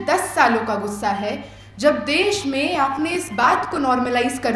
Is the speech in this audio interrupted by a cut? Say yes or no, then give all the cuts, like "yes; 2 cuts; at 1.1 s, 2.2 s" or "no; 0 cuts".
no; 0 cuts